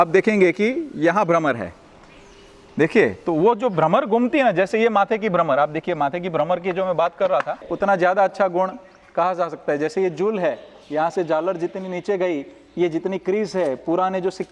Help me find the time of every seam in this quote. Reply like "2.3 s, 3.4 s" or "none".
7.7 s